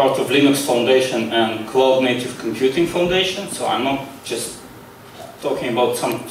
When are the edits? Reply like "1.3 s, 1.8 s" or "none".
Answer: none

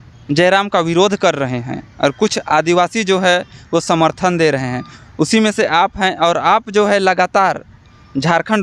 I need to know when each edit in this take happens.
none

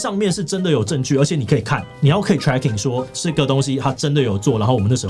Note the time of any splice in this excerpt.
3.2 s

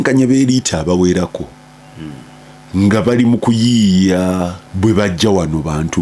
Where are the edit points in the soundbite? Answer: 4.6 s

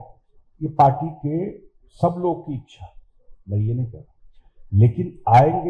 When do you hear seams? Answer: none

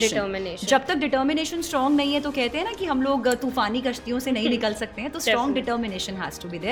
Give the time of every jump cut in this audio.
none

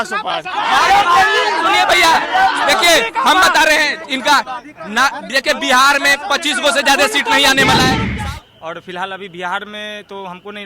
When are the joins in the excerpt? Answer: 8.1 s

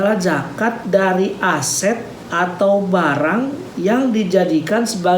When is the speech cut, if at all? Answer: 2.2 s, 3.6 s

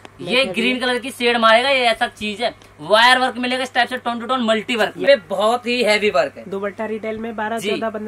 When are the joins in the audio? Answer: 5.0 s

